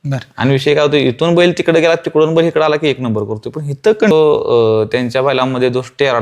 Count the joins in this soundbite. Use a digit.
1